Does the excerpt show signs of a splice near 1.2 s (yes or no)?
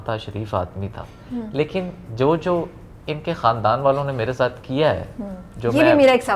no